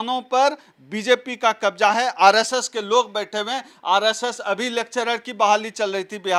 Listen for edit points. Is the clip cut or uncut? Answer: uncut